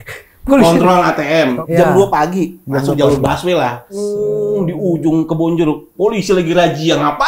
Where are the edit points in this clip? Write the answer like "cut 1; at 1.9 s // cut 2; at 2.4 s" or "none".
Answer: cut 1; at 1.6 s // cut 2; at 3.9 s

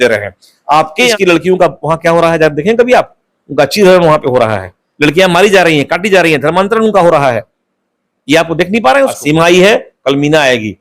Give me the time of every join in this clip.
cut 1; at 1.1 s // cut 2; at 9.2 s

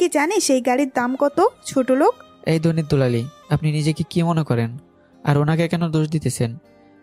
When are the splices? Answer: cut 1; at 2.3 s

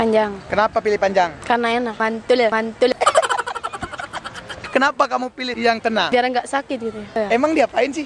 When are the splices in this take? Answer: cut 1; at 2.0 s // cut 2; at 2.9 s // cut 3; at 4.6 s // cut 4; at 5.5 s // cut 5; at 7.2 s

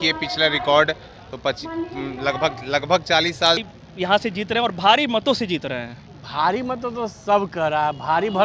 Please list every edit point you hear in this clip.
cut 1; at 3.6 s

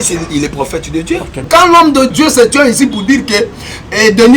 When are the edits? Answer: cut 1; at 1.4 s

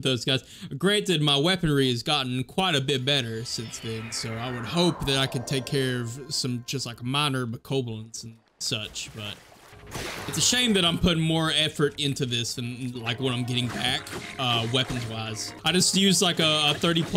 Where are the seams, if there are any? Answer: cut 1; at 9.7 s // cut 2; at 15.5 s

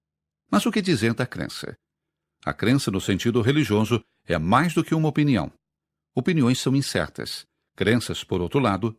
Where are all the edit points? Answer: cut 1; at 2.0 s

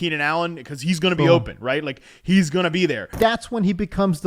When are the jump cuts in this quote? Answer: cut 1; at 3.1 s

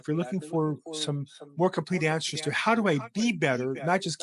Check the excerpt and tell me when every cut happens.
none

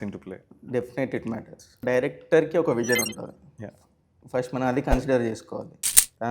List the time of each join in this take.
cut 1; at 1.8 s

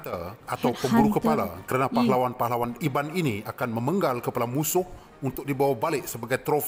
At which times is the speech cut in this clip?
none

